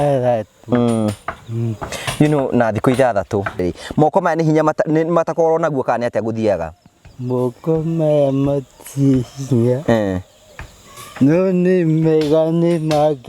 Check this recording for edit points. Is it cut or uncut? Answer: cut